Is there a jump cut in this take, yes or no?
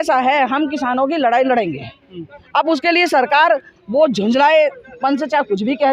no